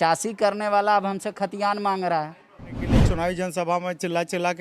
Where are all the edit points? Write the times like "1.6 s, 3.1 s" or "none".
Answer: 2.9 s